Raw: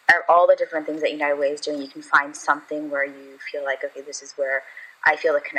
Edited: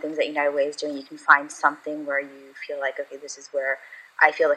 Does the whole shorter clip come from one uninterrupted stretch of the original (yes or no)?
yes